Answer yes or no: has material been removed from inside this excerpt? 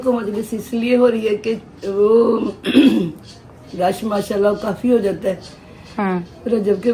no